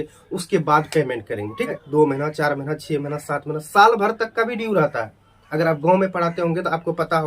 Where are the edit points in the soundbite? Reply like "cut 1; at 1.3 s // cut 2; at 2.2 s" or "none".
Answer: cut 1; at 1.8 s